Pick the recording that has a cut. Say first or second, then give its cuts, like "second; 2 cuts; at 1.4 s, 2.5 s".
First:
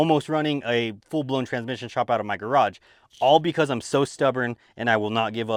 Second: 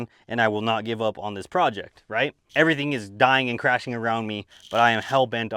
second; 1 cut; at 2.4 s